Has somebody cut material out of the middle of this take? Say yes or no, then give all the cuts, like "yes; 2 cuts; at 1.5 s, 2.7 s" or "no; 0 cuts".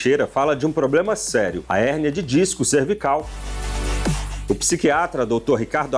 yes; 1 cut; at 3.8 s